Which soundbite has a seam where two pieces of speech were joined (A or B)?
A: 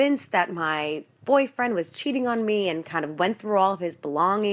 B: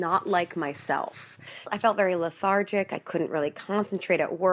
B